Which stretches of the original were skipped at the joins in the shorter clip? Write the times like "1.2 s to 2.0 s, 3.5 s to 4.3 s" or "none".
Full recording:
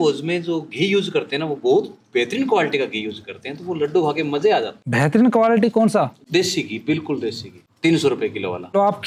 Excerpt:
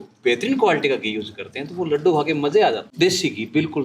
4.8 s to 6.2 s